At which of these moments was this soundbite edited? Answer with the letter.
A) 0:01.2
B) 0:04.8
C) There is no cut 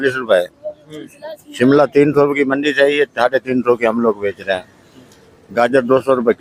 C